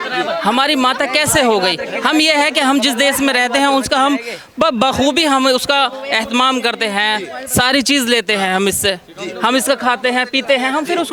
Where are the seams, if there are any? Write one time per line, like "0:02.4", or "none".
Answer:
none